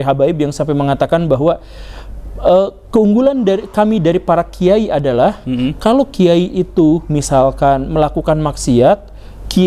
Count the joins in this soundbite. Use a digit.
0